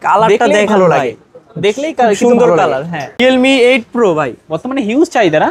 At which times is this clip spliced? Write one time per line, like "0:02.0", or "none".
0:03.2